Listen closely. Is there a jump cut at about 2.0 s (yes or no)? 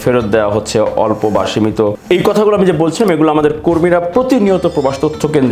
yes